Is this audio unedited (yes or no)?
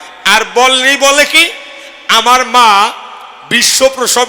yes